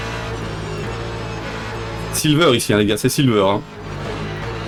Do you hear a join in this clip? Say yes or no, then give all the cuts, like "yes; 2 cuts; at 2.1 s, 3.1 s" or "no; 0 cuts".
no; 0 cuts